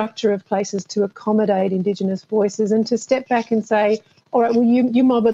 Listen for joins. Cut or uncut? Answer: uncut